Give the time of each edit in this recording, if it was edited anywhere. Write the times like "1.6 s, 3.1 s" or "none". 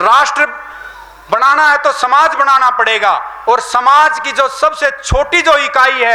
none